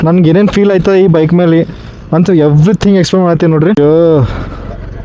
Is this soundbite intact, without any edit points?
no; 1 cut; at 3.8 s

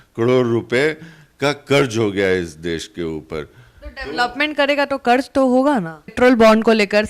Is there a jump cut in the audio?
yes; 1 cut; at 6.1 s

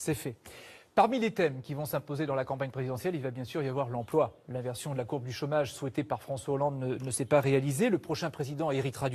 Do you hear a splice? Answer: yes; 1 cut; at 2.3 s

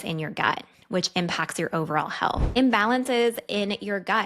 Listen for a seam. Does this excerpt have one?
yes; 1 cut; at 2.5 s

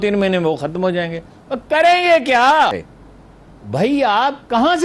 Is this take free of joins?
yes; 0 cuts

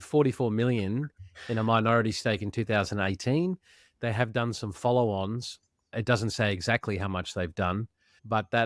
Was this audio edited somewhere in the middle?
no; 0 cuts

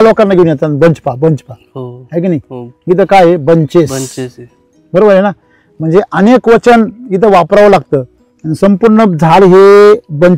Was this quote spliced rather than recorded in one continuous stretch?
no; 0 cuts

